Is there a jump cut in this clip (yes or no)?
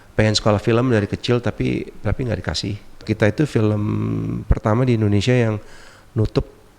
yes